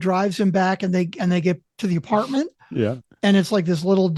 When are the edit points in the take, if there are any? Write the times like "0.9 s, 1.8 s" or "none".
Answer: none